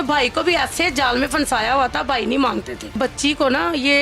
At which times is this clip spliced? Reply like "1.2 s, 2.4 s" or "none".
2.9 s

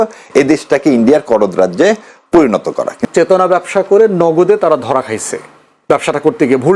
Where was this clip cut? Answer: 3.0 s

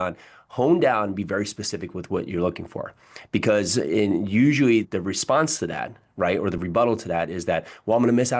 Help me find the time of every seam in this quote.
none

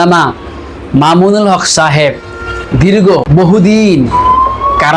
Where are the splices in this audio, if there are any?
3.3 s

